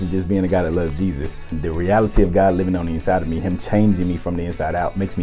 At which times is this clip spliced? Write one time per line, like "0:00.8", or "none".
0:01.4